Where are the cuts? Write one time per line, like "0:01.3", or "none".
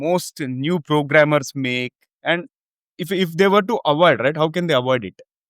0:02.8

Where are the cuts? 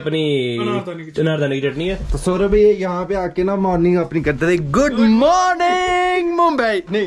0:02.1

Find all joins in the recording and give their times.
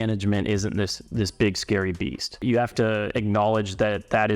0:02.4

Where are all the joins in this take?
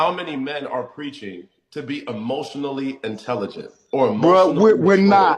0:04.1

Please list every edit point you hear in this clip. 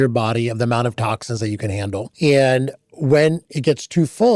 0:02.1

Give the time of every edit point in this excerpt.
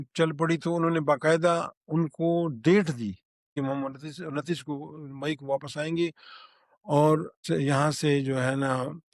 0:03.5
0:07.3

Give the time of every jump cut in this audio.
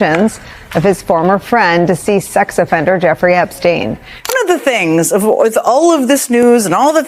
0:04.3

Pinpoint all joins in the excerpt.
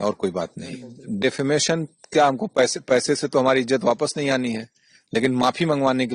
0:00.9

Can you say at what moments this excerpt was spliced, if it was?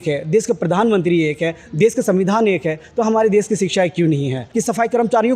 0:04.4

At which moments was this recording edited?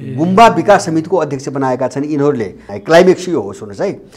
0:02.6

